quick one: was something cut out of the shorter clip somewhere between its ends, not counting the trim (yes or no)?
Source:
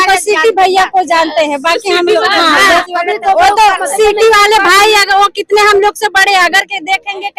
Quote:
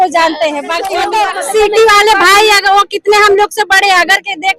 yes